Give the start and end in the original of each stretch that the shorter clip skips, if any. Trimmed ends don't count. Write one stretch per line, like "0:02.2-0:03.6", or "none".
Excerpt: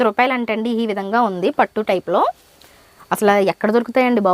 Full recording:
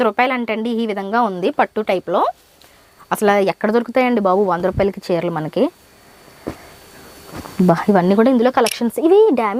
none